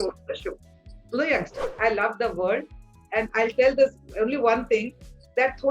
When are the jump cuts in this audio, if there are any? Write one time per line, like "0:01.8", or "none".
0:01.6